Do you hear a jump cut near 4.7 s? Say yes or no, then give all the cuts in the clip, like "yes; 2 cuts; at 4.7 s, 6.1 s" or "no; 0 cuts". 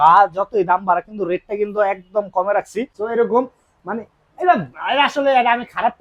no; 1 cut; at 2.9 s